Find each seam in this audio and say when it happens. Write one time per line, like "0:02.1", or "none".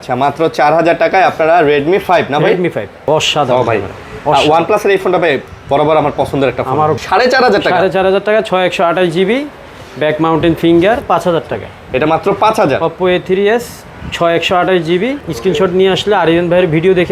0:03.1
0:07.0
0:11.1
0:15.2